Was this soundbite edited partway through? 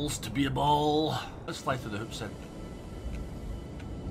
yes; 1 cut; at 1.5 s

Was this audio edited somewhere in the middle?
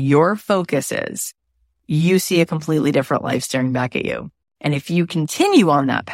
no; 0 cuts

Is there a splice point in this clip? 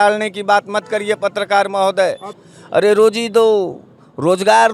yes; 1 cut; at 2.3 s

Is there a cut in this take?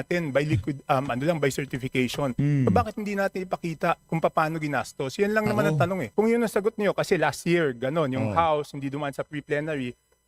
yes; 1 cut; at 6.1 s

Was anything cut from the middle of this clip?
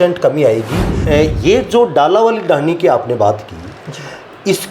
yes; 1 cut; at 1.0 s

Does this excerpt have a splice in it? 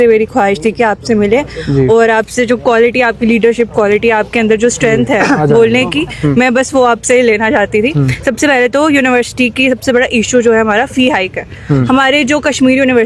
no; 0 cuts

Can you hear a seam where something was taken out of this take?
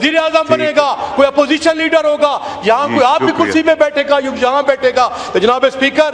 no; 0 cuts

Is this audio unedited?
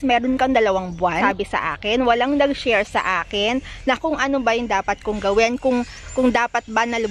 no; 1 cut; at 1.2 s

